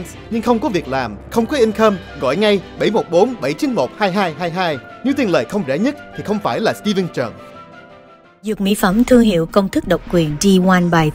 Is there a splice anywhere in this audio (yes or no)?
no